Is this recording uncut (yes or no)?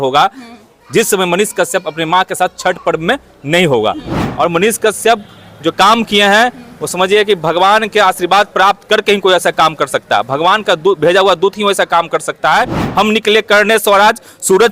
no